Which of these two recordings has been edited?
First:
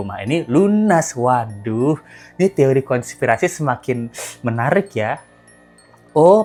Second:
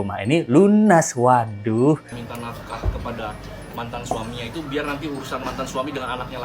second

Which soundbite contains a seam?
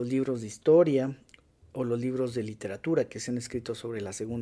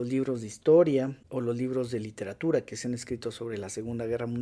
second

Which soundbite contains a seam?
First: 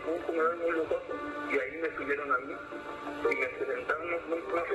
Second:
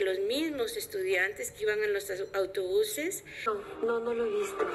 second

